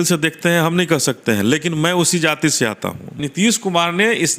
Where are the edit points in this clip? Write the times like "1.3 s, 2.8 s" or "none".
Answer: 3.1 s